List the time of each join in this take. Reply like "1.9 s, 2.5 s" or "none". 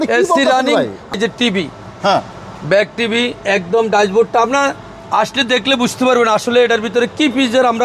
1.3 s